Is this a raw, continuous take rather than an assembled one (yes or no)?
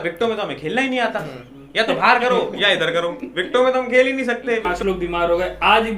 no